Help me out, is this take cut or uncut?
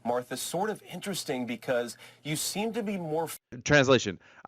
cut